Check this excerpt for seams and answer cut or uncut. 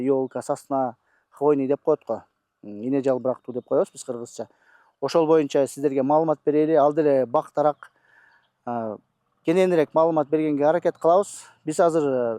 uncut